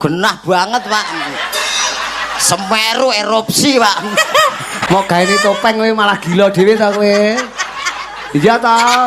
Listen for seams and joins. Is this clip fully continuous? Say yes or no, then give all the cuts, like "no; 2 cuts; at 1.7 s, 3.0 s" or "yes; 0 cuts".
no; 1 cut; at 4.7 s